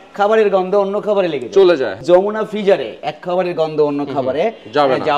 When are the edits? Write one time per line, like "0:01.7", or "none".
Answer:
0:02.0